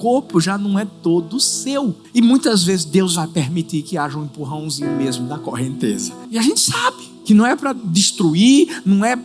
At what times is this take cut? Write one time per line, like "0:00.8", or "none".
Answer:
0:02.0
0:06.2
0:07.1